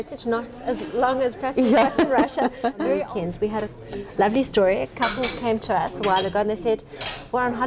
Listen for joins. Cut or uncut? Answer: cut